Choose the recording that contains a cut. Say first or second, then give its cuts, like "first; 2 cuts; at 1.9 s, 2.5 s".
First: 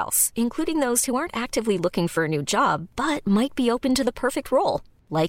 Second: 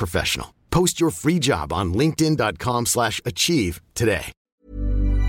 second; 1 cut; at 4.4 s